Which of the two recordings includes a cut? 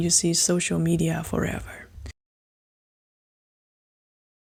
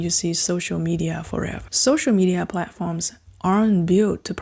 second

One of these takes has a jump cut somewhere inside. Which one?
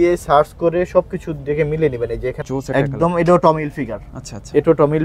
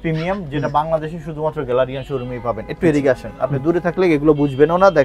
first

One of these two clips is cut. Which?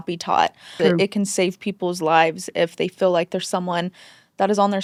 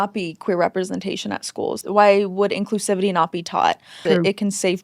second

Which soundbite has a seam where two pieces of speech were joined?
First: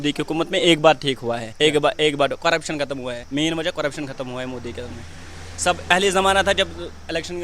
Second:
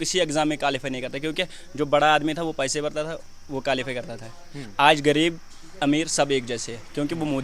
first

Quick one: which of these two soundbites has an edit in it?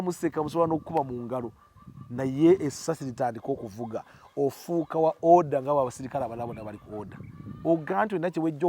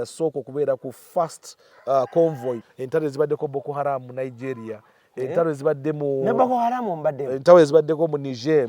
second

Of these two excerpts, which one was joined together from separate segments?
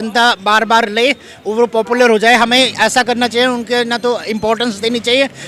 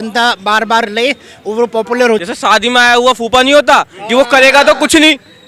second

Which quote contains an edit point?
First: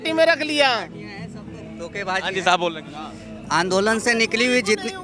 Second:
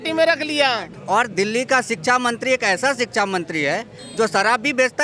second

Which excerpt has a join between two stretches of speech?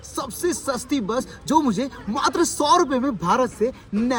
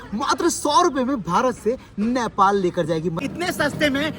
second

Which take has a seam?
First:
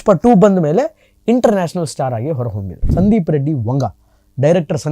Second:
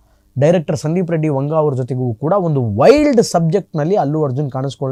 first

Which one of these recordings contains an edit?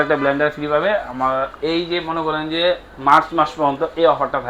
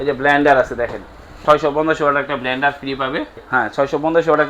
second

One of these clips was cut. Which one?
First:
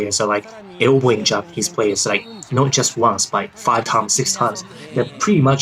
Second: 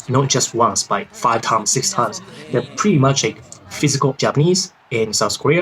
second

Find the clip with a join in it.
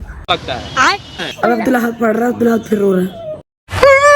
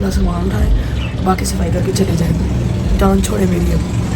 first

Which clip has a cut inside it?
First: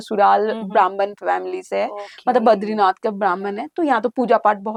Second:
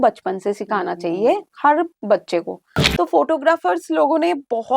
second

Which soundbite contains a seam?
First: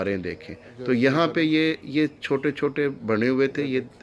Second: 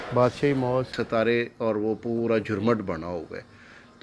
second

